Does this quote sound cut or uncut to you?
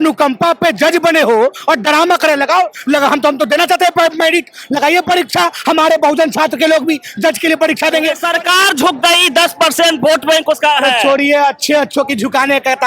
cut